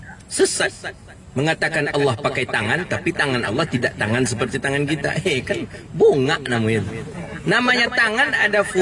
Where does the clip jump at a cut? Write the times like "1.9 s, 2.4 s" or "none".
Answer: none